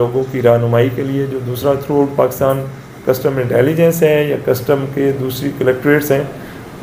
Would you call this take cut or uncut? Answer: uncut